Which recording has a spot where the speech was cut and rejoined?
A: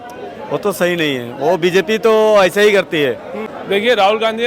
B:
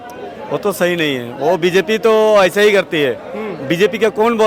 A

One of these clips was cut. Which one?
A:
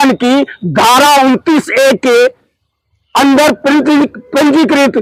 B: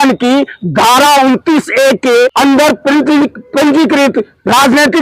B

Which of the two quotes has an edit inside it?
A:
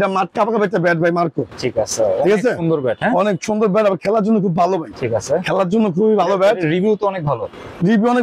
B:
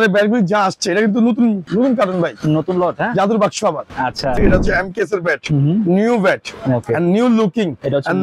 B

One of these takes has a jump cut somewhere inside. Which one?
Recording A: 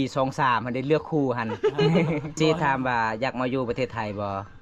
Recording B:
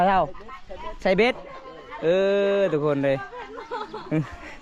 A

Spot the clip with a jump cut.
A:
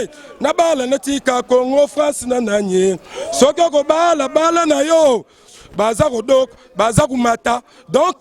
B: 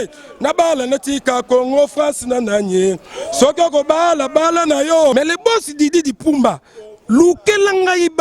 B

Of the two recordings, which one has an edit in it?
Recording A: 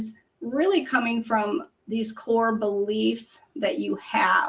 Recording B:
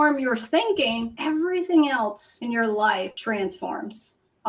B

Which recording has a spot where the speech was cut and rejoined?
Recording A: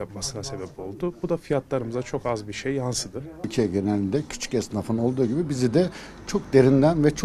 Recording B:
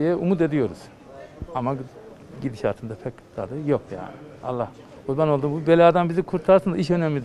A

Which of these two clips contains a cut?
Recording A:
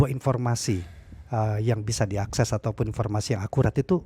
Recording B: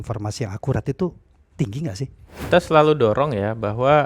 B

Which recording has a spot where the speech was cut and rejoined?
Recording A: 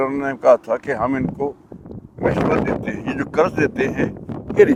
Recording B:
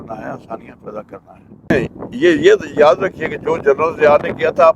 B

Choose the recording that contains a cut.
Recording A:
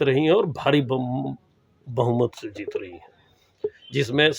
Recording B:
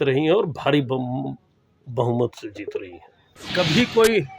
B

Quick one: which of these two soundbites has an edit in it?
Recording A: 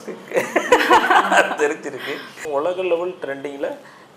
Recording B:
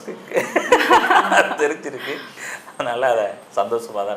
A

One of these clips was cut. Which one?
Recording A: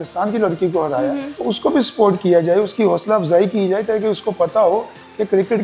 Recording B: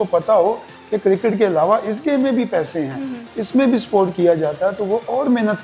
A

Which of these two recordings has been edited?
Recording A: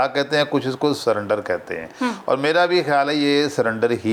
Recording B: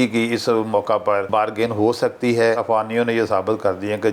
B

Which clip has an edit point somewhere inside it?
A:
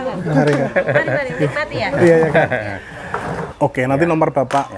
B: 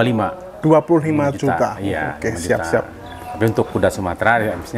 A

